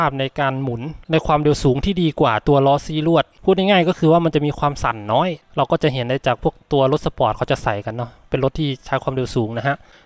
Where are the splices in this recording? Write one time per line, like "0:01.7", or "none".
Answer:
0:05.4